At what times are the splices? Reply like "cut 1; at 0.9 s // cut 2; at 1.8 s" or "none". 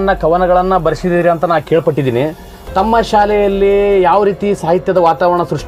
none